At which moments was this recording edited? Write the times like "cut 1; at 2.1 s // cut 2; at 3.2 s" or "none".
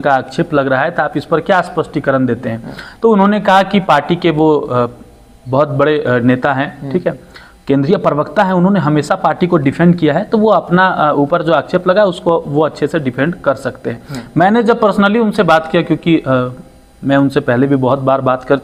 none